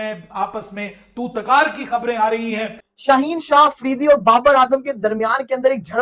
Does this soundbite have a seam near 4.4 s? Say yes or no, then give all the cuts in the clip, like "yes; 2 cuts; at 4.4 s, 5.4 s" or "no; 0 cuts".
no; 1 cut; at 2.9 s